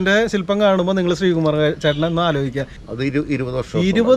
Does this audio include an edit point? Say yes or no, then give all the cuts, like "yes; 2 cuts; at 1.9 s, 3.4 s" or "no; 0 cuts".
yes; 1 cut; at 2.7 s